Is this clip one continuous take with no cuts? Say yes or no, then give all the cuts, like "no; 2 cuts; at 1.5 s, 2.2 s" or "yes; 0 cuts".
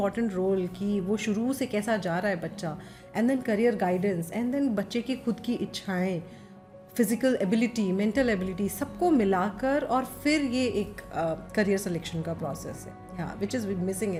yes; 0 cuts